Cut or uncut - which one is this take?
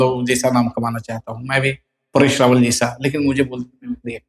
uncut